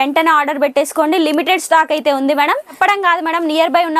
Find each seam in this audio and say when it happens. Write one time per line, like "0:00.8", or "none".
0:02.8